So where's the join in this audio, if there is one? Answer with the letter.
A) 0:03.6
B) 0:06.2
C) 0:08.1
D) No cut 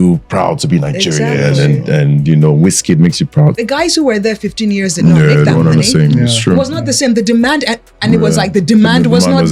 A